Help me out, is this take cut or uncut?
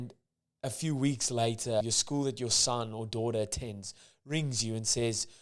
cut